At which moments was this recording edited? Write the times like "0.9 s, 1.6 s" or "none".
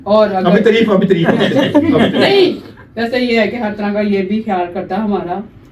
none